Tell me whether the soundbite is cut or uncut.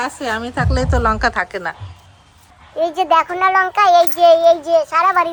uncut